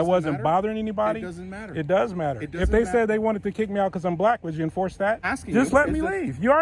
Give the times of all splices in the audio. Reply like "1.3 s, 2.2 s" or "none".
5.3 s